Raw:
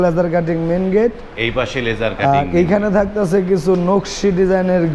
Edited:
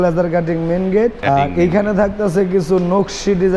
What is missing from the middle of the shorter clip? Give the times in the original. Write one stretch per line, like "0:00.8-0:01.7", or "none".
0:01.2-0:02.2